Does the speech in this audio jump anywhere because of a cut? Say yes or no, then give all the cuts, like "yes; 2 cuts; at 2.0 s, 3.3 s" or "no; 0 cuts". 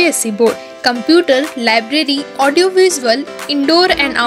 no; 0 cuts